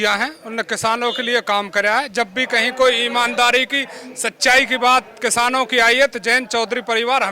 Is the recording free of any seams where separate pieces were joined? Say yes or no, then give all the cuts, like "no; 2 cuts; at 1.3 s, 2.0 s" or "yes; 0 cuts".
yes; 0 cuts